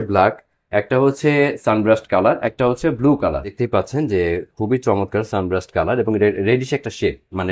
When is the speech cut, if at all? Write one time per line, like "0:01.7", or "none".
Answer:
0:03.5